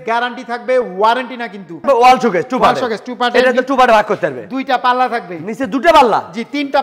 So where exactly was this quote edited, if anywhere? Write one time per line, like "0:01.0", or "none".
0:01.8